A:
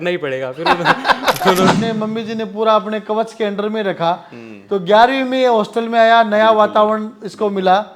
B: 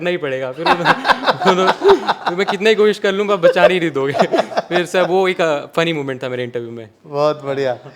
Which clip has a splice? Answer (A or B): A